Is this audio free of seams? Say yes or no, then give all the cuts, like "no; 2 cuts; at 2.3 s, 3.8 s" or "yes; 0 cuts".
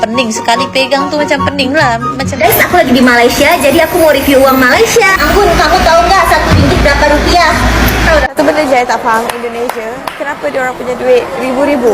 no; 2 cuts; at 2.4 s, 8.3 s